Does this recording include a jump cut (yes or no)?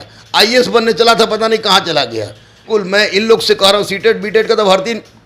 yes